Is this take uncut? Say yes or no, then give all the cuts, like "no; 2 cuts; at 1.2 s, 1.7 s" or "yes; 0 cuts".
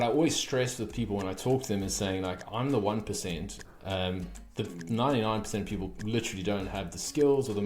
yes; 0 cuts